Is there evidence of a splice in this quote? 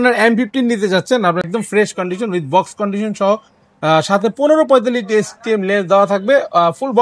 no; 0 cuts

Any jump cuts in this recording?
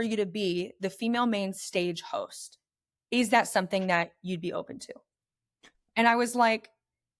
no; 0 cuts

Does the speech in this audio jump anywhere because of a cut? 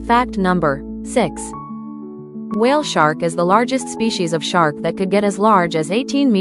yes; 1 cut; at 0.9 s

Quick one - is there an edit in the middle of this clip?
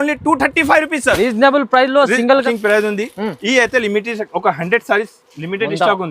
yes; 1 cut; at 2.3 s

